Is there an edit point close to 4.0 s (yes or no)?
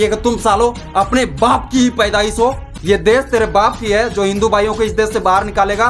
no